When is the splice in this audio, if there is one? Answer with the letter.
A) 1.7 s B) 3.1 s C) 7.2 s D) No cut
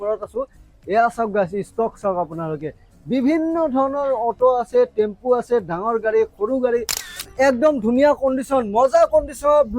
C